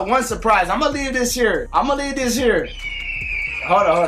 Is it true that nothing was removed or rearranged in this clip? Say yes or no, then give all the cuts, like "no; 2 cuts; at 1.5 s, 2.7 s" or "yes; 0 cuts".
yes; 0 cuts